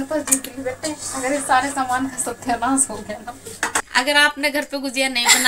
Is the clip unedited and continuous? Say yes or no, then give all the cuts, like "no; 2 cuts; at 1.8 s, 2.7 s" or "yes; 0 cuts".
no; 1 cut; at 3.9 s